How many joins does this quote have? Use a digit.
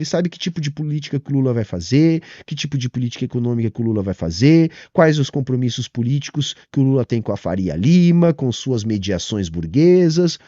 0